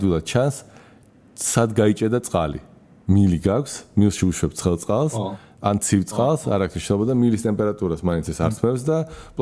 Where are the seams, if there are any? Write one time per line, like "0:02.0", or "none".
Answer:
none